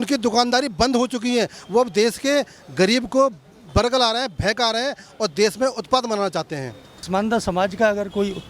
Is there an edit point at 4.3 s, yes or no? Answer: no